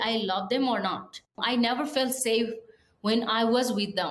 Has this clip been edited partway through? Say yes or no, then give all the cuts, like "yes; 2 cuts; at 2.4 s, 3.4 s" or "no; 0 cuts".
yes; 1 cut; at 1.3 s